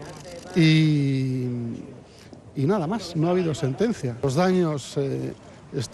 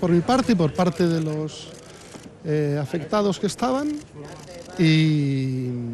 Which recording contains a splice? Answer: first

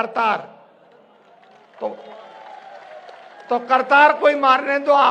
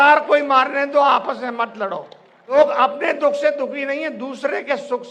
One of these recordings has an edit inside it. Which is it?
second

